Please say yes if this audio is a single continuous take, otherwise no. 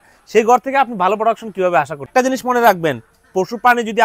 no